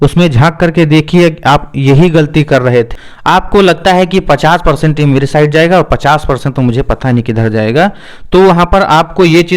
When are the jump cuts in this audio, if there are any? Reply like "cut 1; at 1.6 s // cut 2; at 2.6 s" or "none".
cut 1; at 3.1 s